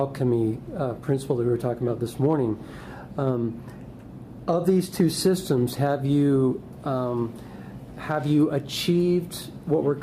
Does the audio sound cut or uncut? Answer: uncut